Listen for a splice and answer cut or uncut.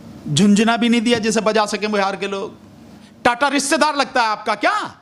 cut